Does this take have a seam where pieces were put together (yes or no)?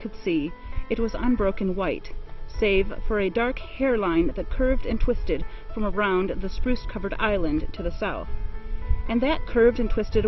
no